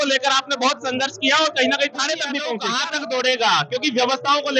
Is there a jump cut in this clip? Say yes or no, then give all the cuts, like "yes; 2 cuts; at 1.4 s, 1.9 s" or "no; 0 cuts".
yes; 1 cut; at 2.6 s